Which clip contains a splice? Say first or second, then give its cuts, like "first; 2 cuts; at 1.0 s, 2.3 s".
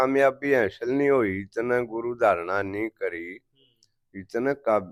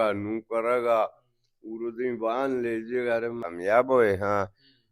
second; 1 cut; at 3.4 s